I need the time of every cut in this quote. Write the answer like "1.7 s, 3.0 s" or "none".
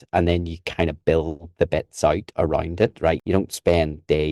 3.2 s